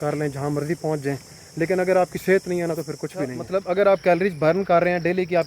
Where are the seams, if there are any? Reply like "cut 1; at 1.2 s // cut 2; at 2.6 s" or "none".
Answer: cut 1; at 3.4 s